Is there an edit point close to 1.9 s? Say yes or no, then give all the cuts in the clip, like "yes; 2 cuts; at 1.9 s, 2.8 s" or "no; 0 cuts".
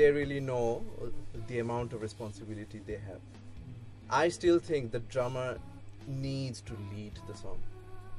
no; 1 cut; at 3.9 s